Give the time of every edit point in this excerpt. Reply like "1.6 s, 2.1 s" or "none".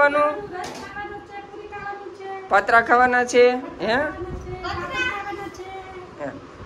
none